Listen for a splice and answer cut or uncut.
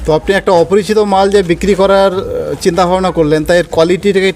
uncut